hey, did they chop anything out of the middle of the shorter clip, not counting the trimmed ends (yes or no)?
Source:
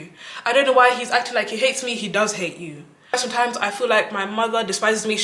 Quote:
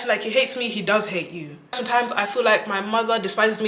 yes